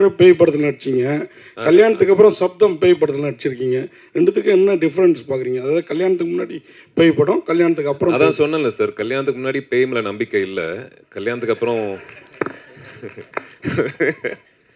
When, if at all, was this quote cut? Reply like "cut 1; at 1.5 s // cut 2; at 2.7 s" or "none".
none